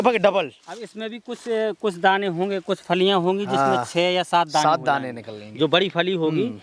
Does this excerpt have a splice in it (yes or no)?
no